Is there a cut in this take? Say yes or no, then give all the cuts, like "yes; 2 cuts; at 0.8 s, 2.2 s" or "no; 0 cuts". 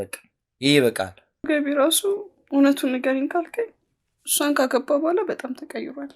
yes; 1 cut; at 1.5 s